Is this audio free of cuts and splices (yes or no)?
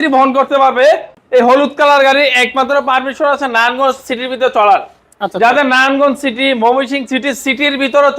no